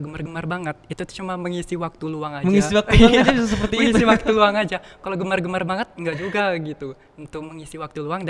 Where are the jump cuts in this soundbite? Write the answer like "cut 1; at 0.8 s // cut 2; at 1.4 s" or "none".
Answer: none